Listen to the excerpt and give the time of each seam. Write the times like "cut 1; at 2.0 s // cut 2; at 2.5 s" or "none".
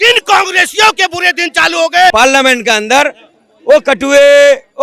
cut 1; at 2.1 s